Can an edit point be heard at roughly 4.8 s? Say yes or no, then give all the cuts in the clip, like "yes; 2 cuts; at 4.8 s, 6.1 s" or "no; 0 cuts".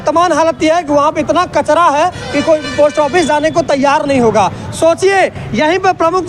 no; 0 cuts